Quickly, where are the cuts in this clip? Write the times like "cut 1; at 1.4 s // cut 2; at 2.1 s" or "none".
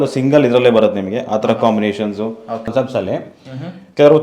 cut 1; at 2.7 s